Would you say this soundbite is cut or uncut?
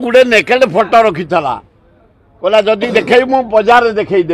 uncut